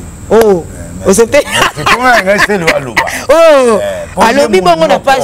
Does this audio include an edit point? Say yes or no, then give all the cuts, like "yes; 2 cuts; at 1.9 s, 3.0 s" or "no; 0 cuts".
no; 0 cuts